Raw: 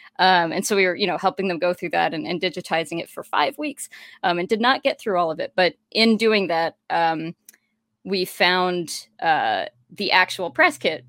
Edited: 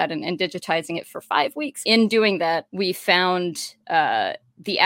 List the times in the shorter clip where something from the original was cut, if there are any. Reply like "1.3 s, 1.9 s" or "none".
1.8 s, 2.7 s